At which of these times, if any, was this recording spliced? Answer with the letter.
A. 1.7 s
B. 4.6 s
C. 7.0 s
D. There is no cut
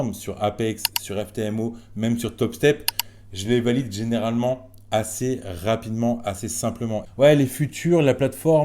C